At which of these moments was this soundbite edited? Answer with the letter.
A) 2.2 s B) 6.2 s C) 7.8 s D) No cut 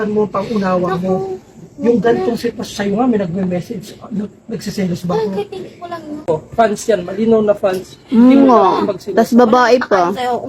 B